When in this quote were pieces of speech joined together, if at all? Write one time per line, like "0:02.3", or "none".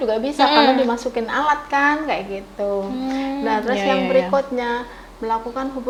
none